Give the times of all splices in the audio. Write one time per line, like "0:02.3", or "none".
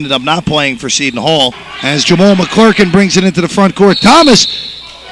0:01.7